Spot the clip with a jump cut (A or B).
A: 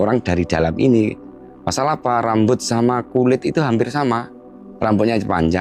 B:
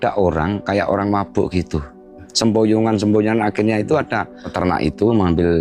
B